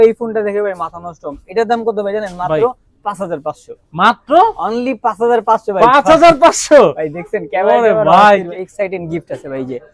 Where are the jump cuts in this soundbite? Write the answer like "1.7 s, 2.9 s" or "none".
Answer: 8.5 s